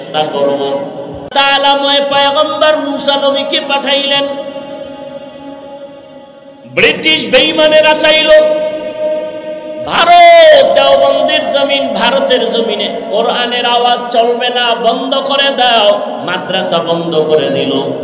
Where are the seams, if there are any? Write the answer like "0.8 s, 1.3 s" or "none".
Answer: 1.2 s